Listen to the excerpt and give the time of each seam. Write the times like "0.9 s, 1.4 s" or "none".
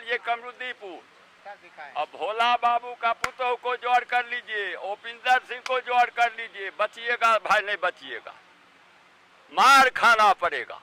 none